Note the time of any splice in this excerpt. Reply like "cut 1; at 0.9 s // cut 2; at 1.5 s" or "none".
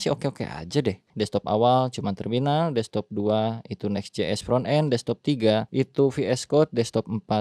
cut 1; at 1.1 s // cut 2; at 5.7 s